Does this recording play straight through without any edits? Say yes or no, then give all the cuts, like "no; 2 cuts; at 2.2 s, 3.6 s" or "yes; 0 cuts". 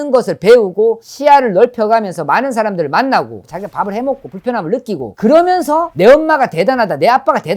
no; 1 cut; at 5.1 s